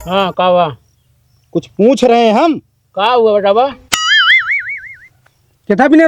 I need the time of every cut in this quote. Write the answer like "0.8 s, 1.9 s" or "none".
none